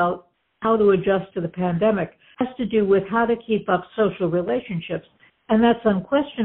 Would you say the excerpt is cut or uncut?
uncut